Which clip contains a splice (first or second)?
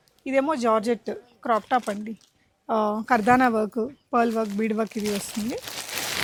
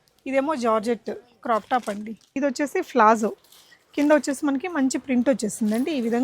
second